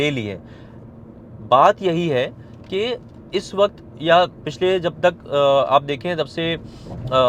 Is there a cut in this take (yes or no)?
no